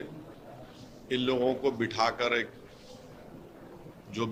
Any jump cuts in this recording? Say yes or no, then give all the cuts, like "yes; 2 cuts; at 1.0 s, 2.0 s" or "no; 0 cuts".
no; 0 cuts